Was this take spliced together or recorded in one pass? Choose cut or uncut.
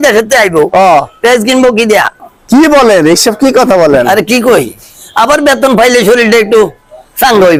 uncut